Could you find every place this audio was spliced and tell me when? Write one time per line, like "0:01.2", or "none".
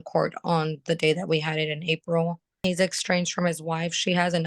0:02.6

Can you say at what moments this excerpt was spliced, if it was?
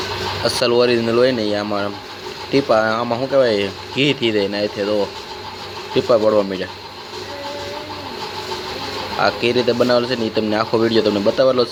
none

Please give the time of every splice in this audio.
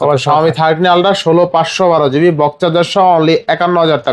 none

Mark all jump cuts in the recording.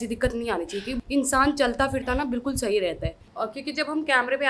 0:01.0
0:03.2

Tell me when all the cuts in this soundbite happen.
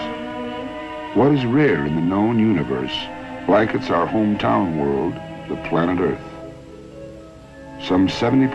none

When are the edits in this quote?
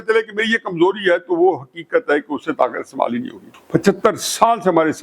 0:03.5

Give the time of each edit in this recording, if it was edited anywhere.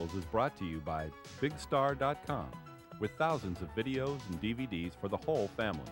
none

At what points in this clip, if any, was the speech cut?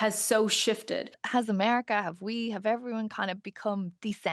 0:01.2

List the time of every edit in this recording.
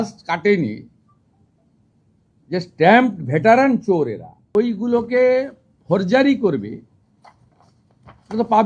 0:04.3

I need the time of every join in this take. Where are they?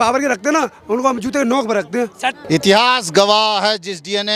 0:02.4

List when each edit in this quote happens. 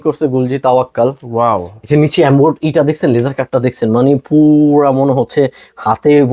none

